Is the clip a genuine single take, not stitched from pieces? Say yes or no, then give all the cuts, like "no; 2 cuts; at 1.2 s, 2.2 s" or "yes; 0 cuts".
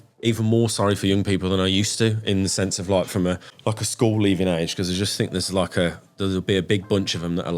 no; 1 cut; at 3.5 s